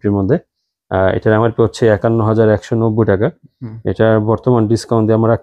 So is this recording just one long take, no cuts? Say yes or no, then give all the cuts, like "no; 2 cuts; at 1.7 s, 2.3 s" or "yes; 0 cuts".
yes; 0 cuts